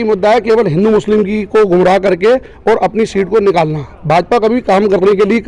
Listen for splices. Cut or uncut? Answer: uncut